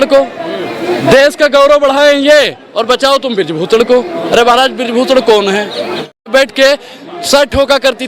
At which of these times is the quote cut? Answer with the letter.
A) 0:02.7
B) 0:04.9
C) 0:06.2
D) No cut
C